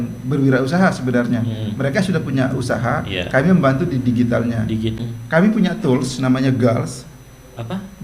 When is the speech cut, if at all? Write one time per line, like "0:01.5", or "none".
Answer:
0:05.0